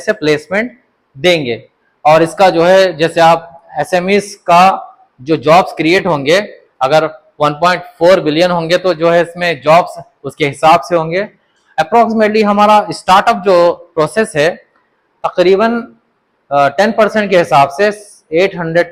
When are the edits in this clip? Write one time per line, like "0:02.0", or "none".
none